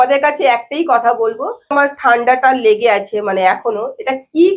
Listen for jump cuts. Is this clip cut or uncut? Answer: cut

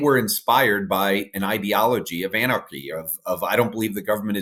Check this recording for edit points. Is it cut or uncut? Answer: uncut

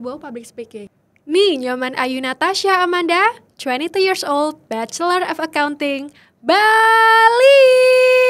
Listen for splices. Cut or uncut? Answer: cut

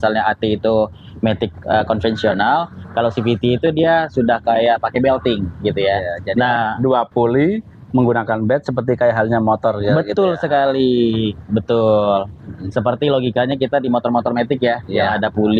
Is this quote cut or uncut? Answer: uncut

